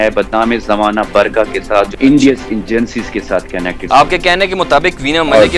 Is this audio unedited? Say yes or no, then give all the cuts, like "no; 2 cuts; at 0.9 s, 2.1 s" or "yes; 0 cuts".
no; 2 cuts; at 1.9 s, 3.8 s